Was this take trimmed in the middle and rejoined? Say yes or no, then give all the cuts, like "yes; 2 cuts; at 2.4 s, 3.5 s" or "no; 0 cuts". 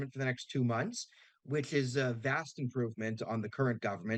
no; 0 cuts